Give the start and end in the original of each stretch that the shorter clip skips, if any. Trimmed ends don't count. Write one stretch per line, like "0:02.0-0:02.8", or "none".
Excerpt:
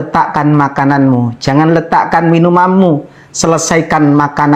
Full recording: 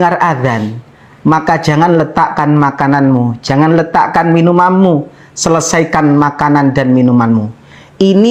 none

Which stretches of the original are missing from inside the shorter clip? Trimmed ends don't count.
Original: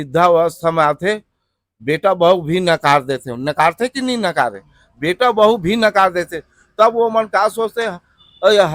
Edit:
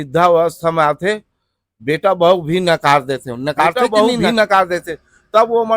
0:03.8-0:05.3

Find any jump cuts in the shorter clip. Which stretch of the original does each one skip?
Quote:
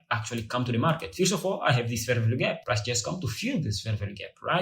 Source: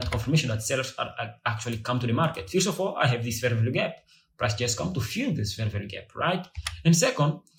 0:04.0-0:04.3

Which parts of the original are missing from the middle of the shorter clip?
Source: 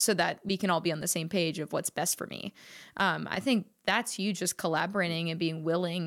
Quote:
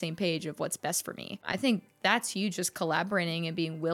0:02.6-0:03.3

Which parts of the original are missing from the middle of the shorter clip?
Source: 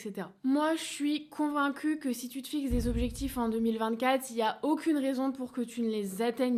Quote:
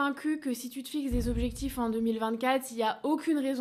none

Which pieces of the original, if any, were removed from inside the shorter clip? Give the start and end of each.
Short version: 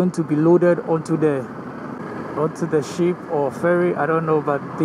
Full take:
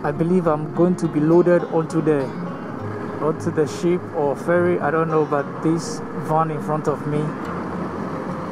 none

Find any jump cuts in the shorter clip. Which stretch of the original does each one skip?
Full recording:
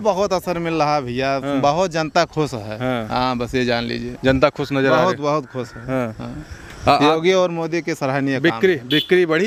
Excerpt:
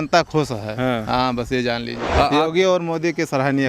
0:04.0-0:06.7

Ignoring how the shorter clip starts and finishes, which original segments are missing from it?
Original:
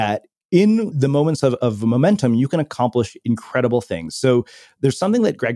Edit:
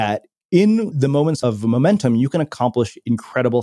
0:01.4-0:01.6

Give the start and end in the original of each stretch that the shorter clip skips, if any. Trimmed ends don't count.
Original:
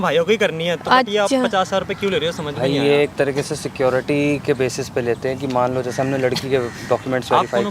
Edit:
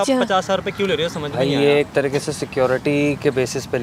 none

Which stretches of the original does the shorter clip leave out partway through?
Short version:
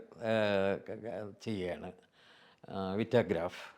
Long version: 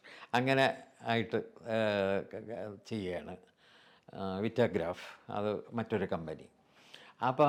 none

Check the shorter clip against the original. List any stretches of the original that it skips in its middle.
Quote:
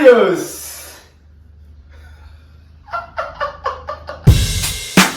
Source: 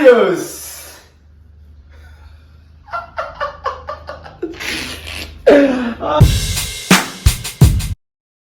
0:04.3-0:06.2

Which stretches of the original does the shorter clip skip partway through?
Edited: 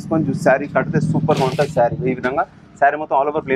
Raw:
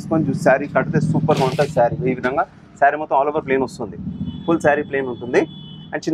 none

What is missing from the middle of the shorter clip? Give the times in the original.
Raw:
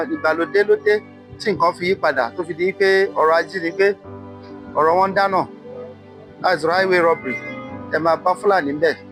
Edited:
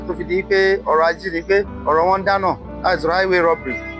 0:04.0-0:04.6
0:05.6-0:06.3

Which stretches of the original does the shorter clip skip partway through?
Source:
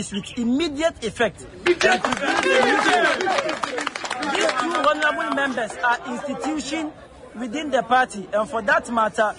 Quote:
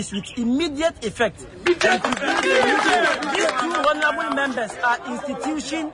0:03.2-0:04.2

